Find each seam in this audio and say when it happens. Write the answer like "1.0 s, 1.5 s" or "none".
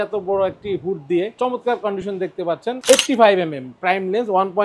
1.4 s, 2.8 s